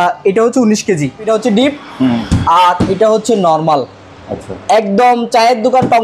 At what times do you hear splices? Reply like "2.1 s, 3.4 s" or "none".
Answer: 1.3 s